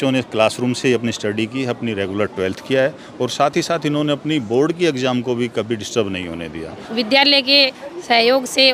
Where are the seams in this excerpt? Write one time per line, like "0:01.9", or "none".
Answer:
0:06.8